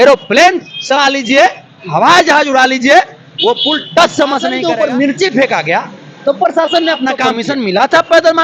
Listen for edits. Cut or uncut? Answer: cut